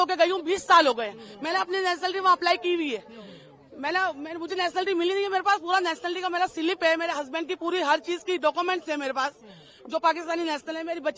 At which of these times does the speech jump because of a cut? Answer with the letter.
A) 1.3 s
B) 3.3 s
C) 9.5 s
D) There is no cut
D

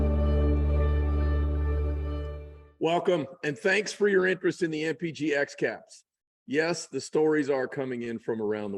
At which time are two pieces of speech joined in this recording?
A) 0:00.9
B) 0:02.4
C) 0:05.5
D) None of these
B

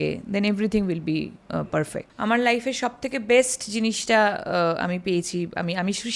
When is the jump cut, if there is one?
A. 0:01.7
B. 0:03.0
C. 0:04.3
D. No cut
A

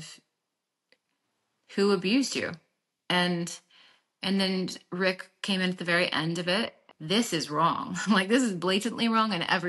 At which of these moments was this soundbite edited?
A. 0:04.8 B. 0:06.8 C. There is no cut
B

